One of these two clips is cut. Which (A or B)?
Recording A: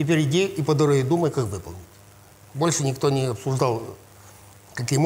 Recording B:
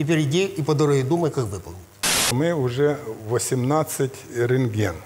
B